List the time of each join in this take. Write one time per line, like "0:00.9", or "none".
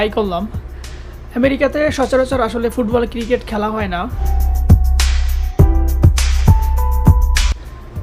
0:04.3
0:06.1